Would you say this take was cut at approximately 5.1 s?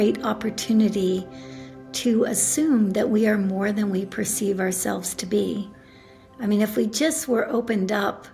no; 0 cuts

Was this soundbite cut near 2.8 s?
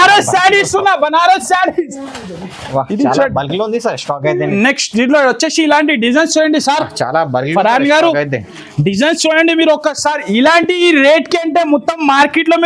no; 0 cuts

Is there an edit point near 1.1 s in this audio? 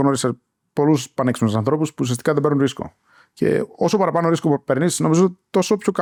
no; 0 cuts

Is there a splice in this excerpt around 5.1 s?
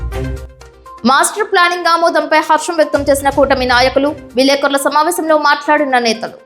no; 1 cut; at 1.0 s

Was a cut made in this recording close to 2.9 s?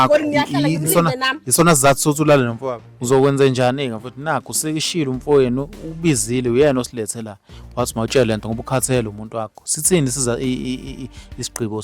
yes; 1 cut; at 2.9 s

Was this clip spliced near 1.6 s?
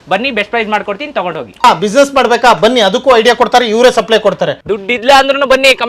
yes; 2 cuts; at 1.6 s, 4.6 s

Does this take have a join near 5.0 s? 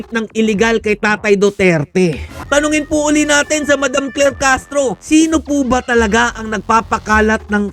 yes; 2 cuts; at 2.3 s, 5.0 s

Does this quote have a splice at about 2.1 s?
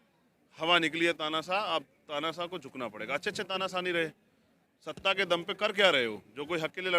no; 0 cuts

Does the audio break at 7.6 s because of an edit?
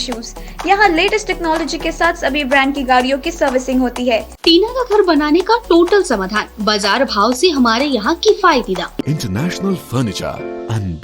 no; 2 cuts; at 4.3 s, 9.0 s

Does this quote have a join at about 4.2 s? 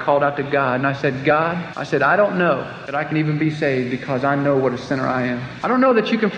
no; 3 cuts; at 1.7 s, 2.8 s, 5.5 s

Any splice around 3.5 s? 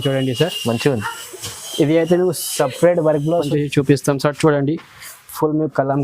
yes; 1 cut; at 3.5 s

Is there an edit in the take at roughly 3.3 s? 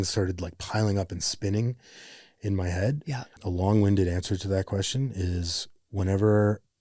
yes; 1 cut; at 3.3 s

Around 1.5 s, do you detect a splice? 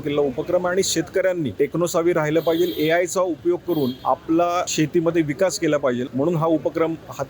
yes; 4 cuts; at 1.5 s, 4.0 s, 4.7 s, 6.1 s

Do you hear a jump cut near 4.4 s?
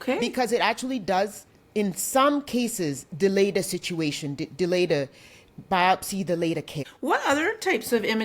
no; 1 cut; at 7.0 s

